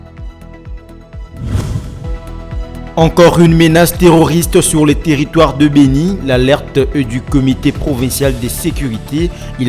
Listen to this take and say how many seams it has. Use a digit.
1